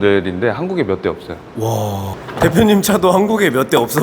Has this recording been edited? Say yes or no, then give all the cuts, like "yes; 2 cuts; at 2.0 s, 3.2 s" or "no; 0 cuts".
yes; 1 cut; at 2.2 s